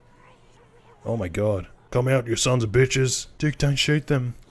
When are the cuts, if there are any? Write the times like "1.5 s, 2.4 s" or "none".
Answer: 1.8 s, 3.2 s